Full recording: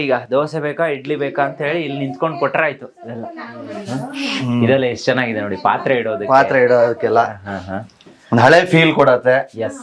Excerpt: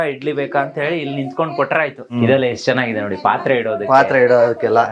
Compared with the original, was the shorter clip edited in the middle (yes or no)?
yes